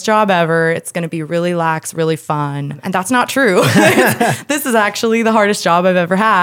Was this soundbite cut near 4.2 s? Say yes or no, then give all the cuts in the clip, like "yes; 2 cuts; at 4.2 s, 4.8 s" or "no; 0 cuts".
no; 1 cut; at 2.8 s